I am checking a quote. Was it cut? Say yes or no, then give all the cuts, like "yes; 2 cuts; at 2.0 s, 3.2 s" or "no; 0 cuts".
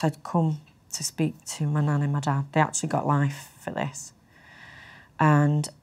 no; 0 cuts